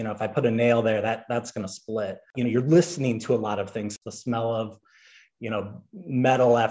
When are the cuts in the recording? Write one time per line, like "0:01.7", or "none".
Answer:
0:02.3
0:03.9